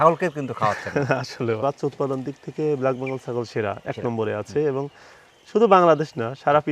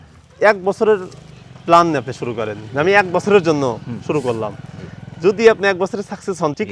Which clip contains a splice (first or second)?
first